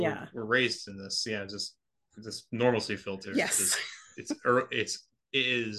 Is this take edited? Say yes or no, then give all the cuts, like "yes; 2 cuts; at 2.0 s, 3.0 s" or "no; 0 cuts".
yes; 1 cut; at 3.2 s